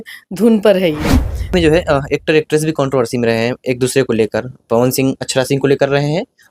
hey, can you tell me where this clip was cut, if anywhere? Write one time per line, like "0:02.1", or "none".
0:01.5